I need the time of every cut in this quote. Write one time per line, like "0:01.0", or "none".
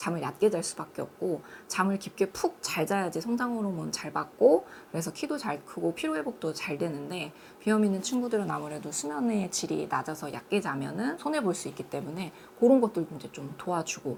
none